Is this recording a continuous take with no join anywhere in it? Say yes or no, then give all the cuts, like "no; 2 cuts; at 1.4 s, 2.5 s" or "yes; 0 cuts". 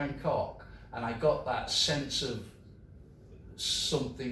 yes; 0 cuts